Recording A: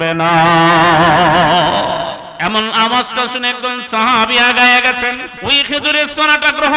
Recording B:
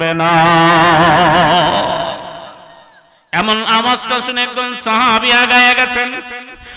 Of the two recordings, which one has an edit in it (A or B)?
A